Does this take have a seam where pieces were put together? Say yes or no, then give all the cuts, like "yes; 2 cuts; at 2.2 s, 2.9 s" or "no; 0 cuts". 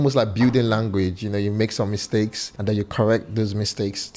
yes; 1 cut; at 2.5 s